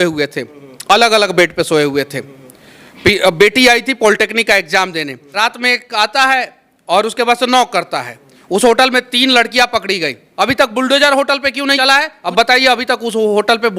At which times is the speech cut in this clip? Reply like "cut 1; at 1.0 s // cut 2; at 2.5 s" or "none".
cut 1; at 5.2 s // cut 2; at 10.2 s // cut 3; at 11.8 s